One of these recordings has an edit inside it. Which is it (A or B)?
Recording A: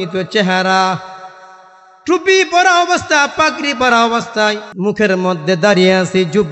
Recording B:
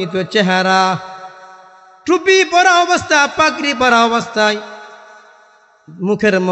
A